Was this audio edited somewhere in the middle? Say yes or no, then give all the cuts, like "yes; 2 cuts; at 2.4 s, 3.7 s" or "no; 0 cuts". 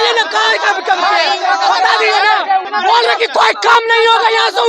yes; 1 cut; at 2.6 s